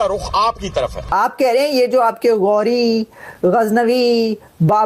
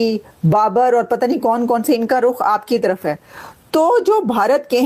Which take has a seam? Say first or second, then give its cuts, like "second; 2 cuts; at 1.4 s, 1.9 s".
first; 1 cut; at 1.1 s